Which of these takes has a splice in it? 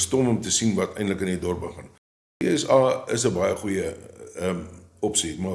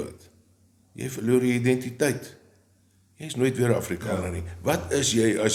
first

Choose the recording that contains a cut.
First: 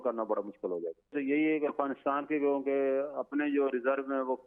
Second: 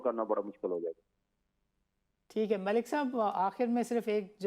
first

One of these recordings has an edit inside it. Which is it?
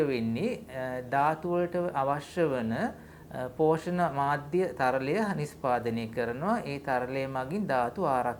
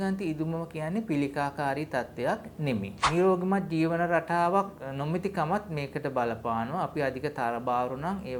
second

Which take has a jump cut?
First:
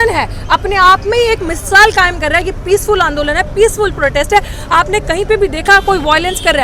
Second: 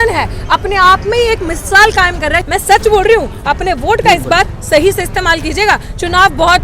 second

